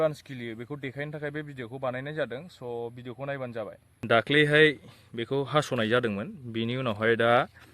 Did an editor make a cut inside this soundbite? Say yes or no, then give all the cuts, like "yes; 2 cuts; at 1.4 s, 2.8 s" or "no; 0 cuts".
yes; 1 cut; at 3.9 s